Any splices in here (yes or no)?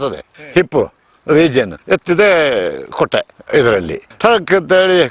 yes